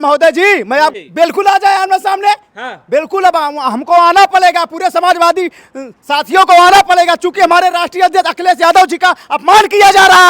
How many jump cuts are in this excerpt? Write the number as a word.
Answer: one